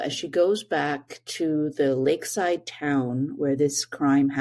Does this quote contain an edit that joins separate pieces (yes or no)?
no